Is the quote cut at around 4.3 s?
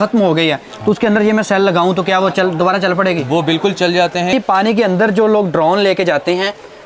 yes; 1 cut; at 4.3 s

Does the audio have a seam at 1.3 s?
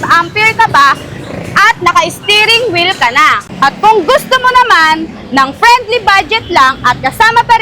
no; 1 cut; at 3.5 s

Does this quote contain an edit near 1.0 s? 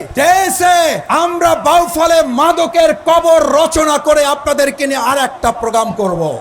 yes; 1 cut; at 1.0 s

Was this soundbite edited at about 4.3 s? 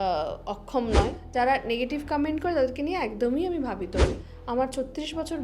yes; 2 cuts; at 1.2 s, 4.3 s

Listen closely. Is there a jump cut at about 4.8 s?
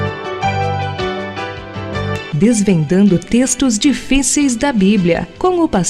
no; 0 cuts

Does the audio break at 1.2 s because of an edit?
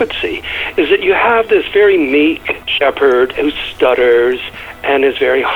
no; 2 cuts; at 2.7 s, 3.3 s

